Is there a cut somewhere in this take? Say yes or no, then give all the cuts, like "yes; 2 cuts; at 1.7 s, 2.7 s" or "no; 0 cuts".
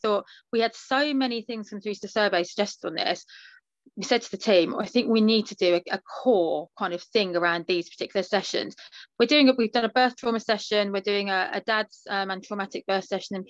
no; 0 cuts